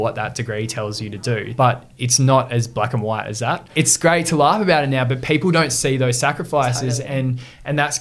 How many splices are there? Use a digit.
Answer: 2